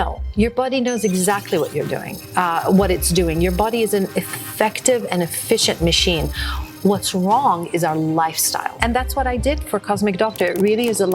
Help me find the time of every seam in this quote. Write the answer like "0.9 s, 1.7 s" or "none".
8.8 s